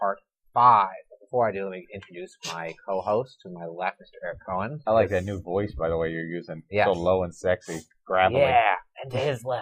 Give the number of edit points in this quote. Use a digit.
1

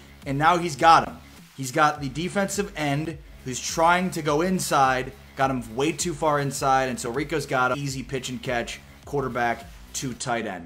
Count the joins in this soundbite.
1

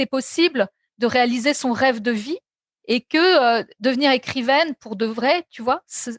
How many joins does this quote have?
0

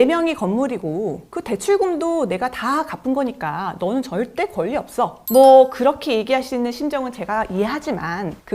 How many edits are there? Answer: 1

